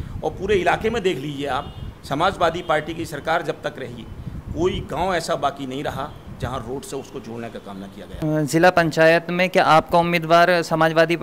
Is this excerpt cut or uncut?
cut